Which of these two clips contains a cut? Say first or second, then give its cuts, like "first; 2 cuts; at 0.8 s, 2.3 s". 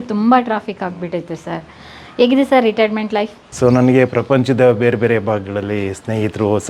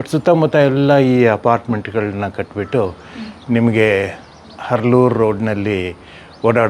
first; 1 cut; at 3.4 s